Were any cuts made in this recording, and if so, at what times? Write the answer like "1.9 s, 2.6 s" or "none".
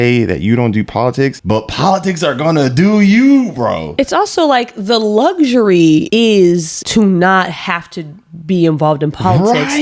1.4 s, 3.9 s, 6.1 s, 6.8 s